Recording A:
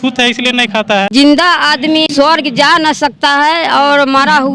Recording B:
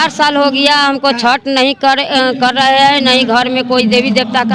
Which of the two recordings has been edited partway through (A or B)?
A